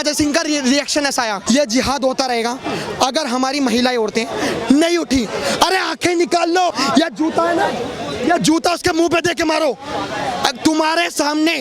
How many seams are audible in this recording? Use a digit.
2